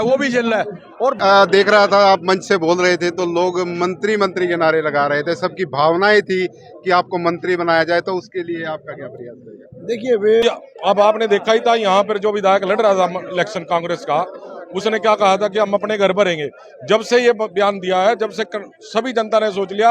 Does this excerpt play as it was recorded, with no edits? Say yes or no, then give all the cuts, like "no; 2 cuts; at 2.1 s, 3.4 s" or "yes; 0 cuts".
no; 2 cuts; at 1.2 s, 10.4 s